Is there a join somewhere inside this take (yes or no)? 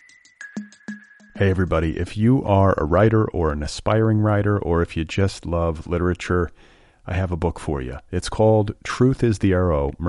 yes